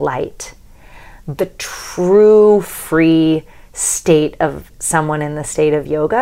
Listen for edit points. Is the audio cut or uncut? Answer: cut